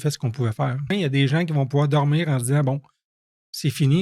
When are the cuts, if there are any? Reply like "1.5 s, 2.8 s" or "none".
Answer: 0.9 s